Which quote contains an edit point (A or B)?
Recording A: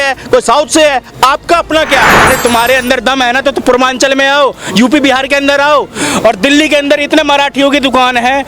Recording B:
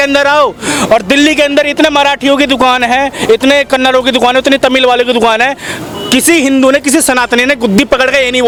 A